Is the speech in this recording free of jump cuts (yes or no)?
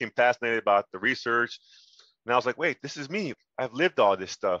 no